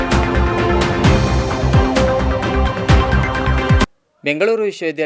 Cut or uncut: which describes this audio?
uncut